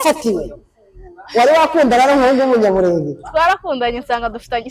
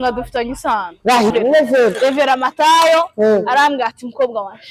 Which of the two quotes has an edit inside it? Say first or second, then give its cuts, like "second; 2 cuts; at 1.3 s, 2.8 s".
second; 1 cut; at 1.3 s